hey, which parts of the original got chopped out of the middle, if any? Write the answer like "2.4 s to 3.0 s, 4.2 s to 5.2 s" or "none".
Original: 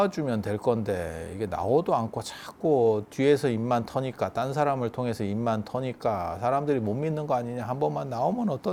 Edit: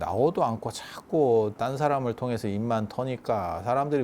3.1 s to 4.3 s